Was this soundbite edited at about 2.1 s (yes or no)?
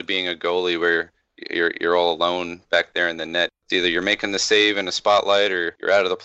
no